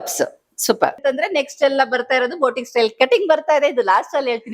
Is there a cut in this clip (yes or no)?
yes